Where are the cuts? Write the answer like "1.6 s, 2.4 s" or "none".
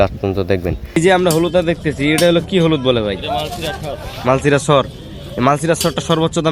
1.0 s